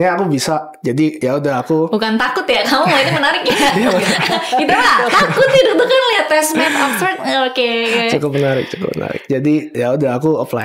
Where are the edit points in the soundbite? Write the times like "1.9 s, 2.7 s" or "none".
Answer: 1.2 s, 9.7 s